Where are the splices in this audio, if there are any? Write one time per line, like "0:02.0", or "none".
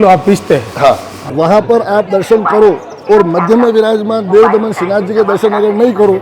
0:01.2

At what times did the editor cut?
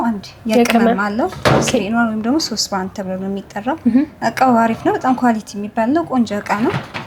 none

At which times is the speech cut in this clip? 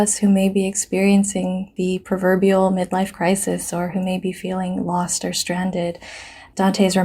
0:02.0

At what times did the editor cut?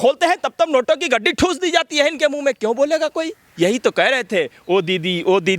0:03.3

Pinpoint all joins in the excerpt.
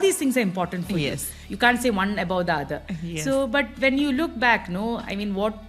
0:01.3

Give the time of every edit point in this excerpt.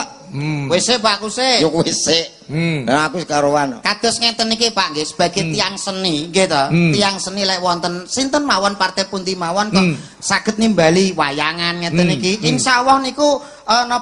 none

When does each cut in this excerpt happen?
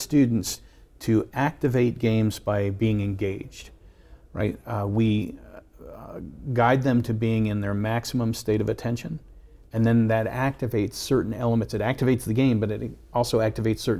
none

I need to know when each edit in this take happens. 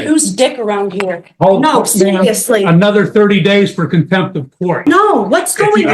0:04.8

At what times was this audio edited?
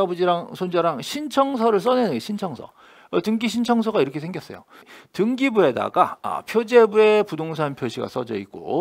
0:04.9

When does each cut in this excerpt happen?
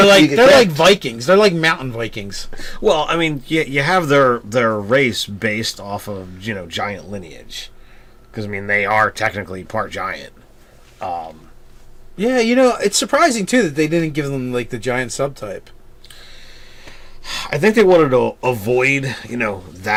none

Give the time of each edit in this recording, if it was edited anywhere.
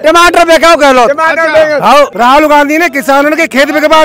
0:02.1

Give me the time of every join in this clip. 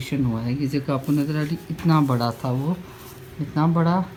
none

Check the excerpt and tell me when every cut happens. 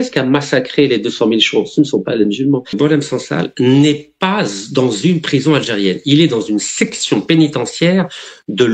0:02.8

